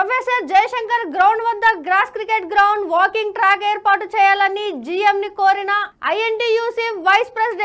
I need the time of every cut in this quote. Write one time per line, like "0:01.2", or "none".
none